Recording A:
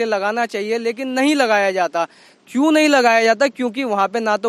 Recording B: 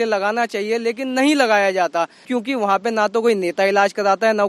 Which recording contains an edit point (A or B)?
B